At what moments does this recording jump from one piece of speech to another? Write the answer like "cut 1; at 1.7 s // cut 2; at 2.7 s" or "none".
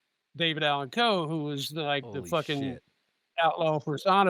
none